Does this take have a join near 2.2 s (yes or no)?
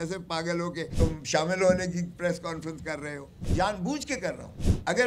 no